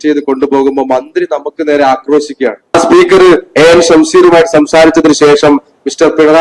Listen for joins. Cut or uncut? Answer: cut